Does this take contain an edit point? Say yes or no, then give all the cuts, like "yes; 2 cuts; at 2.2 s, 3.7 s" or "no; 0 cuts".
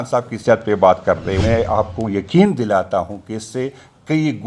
yes; 1 cut; at 1.4 s